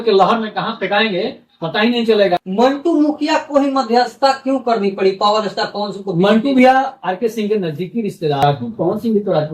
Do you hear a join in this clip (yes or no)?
yes